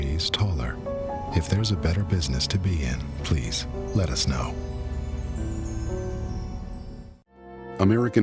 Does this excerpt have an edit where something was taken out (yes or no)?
yes